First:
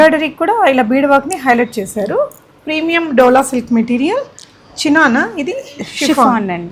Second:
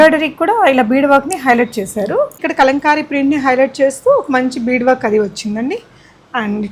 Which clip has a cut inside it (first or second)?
second